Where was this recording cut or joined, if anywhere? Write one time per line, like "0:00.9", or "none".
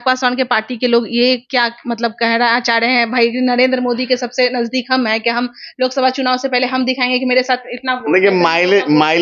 none